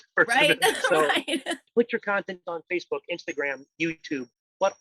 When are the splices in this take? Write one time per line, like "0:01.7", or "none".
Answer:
0:01.7

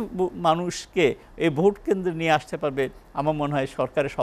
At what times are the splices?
none

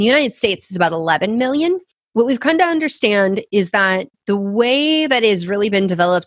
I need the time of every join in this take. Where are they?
0:01.9
0:04.1

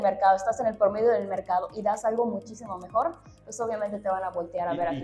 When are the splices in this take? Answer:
none

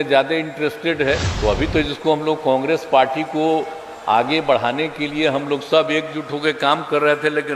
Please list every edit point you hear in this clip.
0:01.3

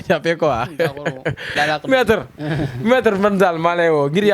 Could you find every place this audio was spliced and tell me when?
0:01.5

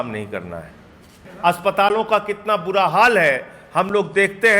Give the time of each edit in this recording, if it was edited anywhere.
0:01.2

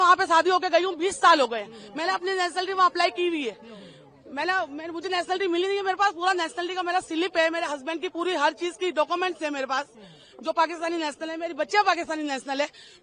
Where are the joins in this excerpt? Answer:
none

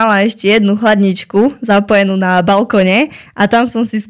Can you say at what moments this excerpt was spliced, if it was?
none

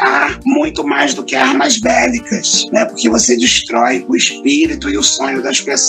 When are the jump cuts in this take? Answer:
none

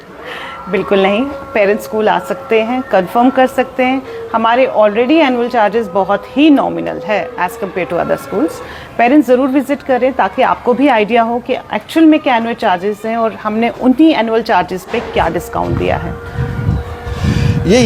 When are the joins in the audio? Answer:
none

